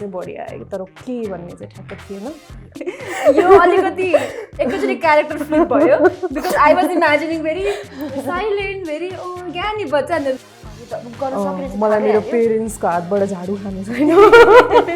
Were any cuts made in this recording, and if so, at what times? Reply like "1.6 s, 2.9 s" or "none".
2.8 s, 10.4 s